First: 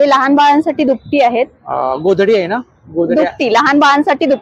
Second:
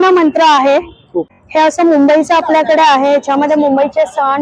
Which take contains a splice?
second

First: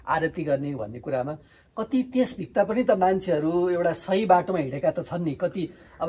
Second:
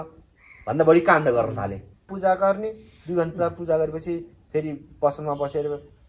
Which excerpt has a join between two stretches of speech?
second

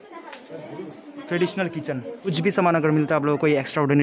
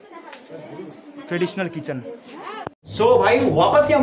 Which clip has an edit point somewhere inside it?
first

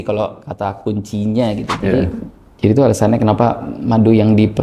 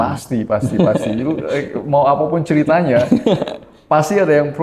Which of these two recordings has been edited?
first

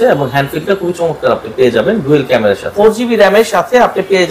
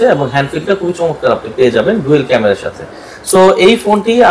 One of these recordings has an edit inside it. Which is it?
first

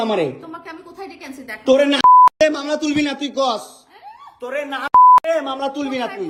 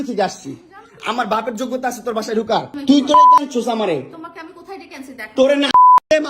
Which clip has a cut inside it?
second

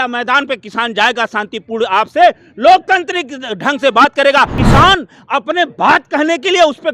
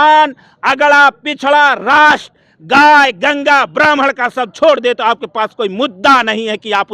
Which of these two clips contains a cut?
first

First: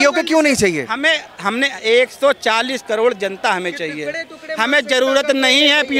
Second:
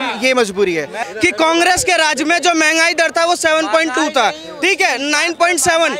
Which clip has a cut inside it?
second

